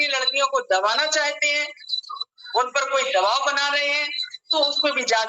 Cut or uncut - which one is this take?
uncut